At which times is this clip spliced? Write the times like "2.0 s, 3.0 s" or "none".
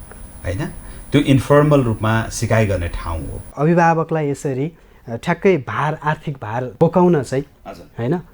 3.5 s, 6.6 s